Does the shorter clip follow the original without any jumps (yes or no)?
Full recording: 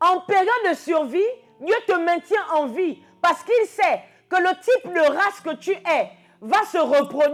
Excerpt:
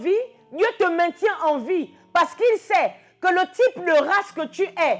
yes